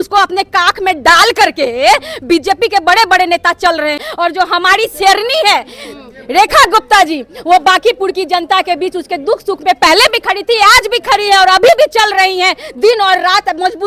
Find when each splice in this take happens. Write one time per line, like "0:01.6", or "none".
0:04.0